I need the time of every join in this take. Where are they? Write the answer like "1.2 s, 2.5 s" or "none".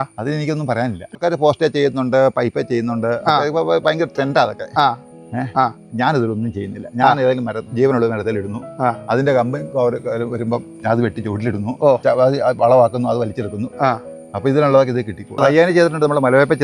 12.0 s, 15.4 s